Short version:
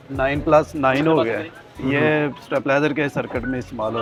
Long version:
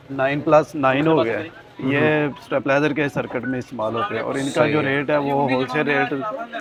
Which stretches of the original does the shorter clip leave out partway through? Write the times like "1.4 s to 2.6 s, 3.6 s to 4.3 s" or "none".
none